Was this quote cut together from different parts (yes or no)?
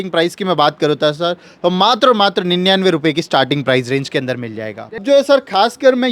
yes